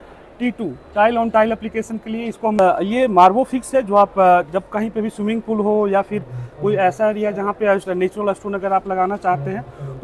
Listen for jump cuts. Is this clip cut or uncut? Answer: cut